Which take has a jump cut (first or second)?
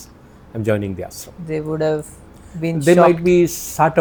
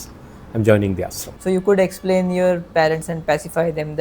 second